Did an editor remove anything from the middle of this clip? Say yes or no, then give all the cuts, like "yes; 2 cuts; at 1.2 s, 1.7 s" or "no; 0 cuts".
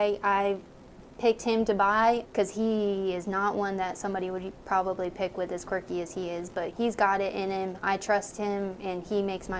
yes; 2 cuts; at 2.2 s, 6.7 s